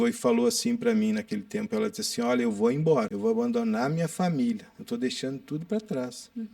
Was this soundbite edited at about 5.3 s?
no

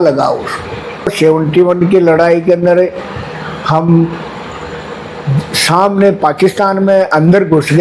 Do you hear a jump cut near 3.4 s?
no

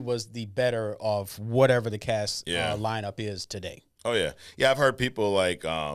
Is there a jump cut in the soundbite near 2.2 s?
no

